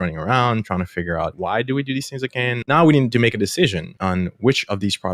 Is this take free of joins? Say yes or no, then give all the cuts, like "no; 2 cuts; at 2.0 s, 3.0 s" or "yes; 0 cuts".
no; 3 cuts; at 1.3 s, 2.6 s, 3.9 s